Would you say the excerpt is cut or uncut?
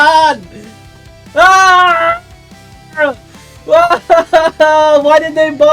uncut